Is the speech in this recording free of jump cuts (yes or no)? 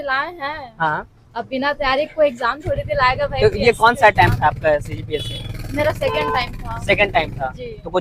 yes